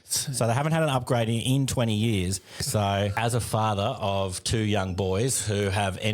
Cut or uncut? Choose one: cut